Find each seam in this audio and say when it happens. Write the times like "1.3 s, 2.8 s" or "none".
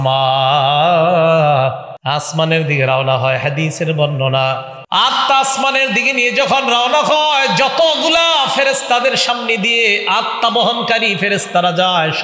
1.9 s, 4.7 s